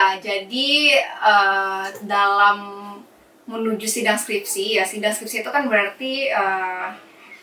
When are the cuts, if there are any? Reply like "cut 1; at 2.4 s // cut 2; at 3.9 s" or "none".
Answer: none